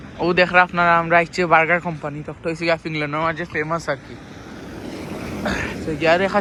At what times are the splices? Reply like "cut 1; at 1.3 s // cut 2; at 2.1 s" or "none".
none